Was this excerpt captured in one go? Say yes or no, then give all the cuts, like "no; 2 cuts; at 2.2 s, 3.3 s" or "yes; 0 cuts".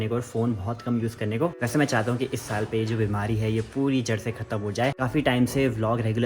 no; 2 cuts; at 1.5 s, 5.0 s